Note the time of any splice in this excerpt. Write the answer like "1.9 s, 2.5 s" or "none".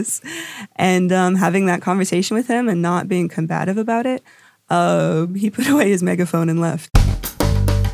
6.8 s